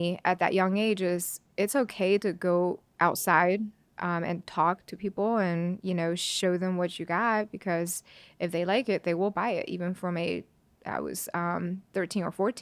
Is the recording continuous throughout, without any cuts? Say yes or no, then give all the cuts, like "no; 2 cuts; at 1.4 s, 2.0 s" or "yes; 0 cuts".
no; 1 cut; at 2.9 s